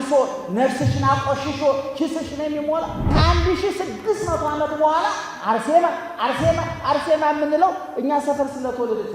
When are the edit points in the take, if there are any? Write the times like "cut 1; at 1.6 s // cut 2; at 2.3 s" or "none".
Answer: cut 1; at 3.0 s